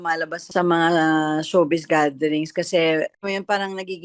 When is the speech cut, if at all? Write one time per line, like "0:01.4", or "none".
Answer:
0:03.1